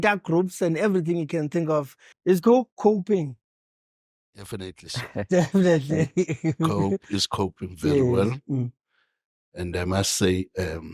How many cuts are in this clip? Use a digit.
1